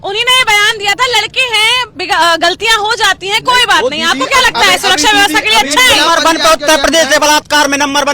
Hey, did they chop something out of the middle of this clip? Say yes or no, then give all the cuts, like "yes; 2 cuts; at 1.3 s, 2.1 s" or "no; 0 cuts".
no; 0 cuts